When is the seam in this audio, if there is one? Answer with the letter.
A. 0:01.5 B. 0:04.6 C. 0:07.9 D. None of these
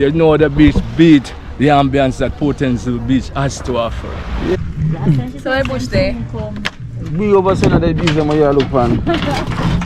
B